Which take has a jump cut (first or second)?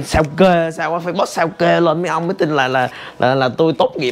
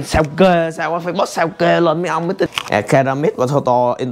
second